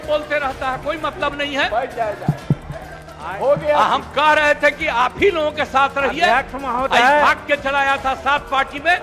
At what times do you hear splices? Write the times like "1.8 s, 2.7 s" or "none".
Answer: none